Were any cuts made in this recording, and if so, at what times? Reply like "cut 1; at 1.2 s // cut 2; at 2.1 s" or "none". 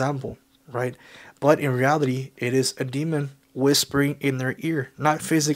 none